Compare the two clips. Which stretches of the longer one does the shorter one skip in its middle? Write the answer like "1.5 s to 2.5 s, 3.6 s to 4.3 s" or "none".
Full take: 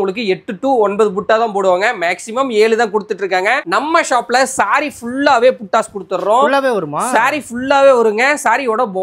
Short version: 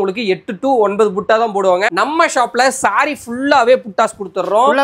1.9 s to 3.7 s